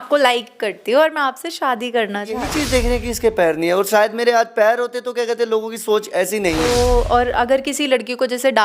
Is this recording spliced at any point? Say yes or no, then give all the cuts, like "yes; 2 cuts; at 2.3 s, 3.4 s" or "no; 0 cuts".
yes; 2 cuts; at 2.5 s, 6.6 s